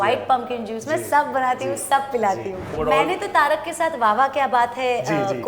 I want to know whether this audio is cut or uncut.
cut